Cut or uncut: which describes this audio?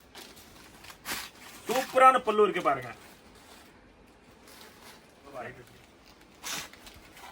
uncut